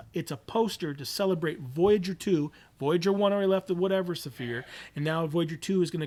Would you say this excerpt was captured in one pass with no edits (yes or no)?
yes